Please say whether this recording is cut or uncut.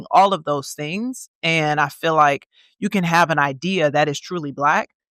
uncut